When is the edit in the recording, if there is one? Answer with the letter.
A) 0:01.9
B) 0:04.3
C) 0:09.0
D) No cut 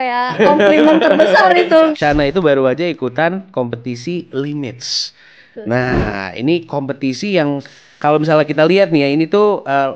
A